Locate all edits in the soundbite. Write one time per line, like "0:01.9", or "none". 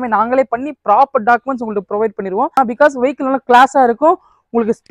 0:02.5